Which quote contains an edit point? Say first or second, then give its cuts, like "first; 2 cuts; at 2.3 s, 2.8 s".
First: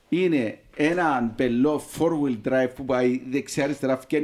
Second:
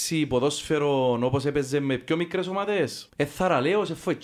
second; 1 cut; at 3.0 s